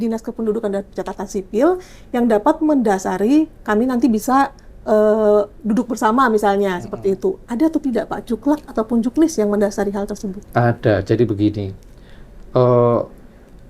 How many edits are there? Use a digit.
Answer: 0